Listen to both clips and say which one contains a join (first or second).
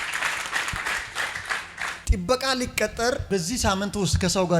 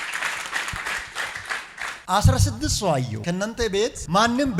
first